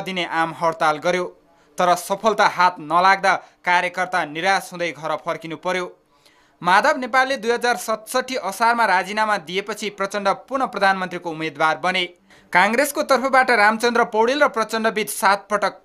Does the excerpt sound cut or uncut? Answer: cut